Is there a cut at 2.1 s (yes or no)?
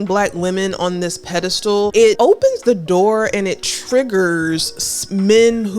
yes